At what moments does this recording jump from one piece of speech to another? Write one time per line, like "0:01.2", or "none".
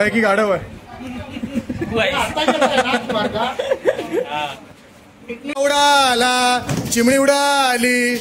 0:05.5